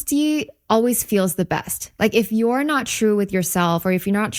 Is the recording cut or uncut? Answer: uncut